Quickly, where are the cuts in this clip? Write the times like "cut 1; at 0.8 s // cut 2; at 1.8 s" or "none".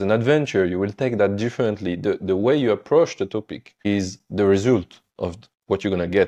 cut 1; at 3.7 s // cut 2; at 5.4 s